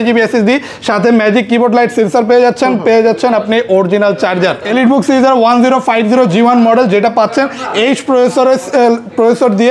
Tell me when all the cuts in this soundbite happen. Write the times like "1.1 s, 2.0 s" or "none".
4.6 s